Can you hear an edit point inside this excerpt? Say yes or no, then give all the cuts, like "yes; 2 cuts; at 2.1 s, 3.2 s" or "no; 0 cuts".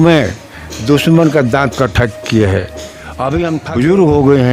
yes; 1 cut; at 3.6 s